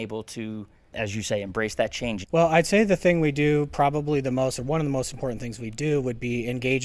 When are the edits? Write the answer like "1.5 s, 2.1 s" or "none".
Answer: 0.9 s, 2.2 s